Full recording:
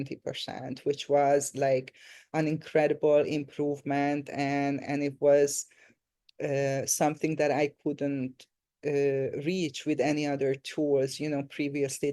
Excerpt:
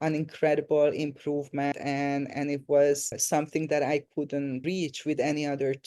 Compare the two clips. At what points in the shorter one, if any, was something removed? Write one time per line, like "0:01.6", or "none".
0:01.7
0:03.2
0:04.6